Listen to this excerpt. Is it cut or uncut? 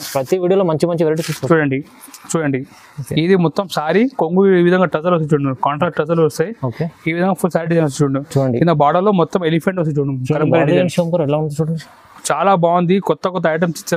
uncut